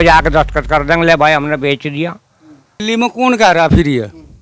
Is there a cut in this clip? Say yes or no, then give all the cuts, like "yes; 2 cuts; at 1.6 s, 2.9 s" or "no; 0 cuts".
yes; 1 cut; at 2.8 s